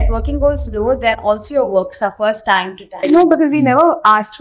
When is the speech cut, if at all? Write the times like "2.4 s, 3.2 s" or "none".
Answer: 2.8 s